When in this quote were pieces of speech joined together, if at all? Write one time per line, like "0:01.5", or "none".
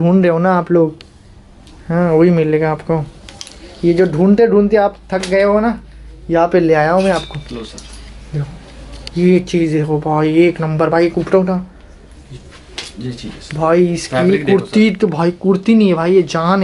none